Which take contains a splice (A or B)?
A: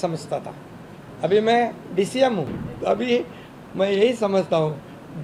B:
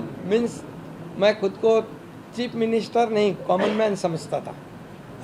A